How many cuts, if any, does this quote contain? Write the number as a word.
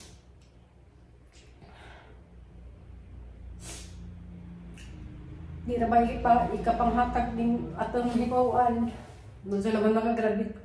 zero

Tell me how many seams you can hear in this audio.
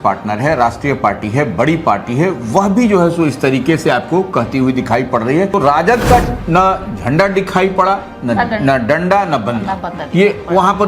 one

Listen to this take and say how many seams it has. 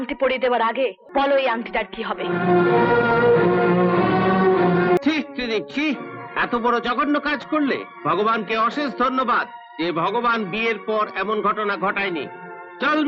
two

